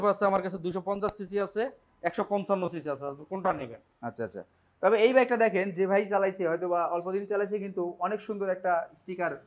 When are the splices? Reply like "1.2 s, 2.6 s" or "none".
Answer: none